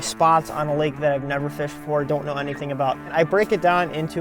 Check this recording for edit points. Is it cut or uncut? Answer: cut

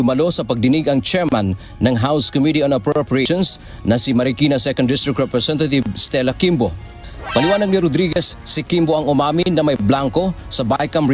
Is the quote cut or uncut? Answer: uncut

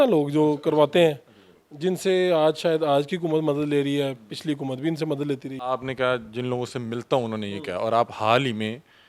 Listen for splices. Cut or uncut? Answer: cut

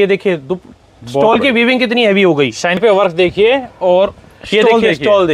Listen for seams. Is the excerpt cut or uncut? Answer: cut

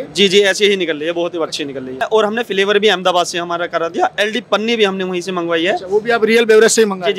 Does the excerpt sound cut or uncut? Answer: cut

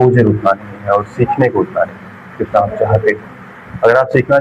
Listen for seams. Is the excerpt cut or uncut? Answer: uncut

